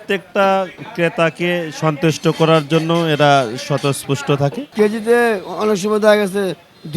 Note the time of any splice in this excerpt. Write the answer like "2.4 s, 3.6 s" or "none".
4.7 s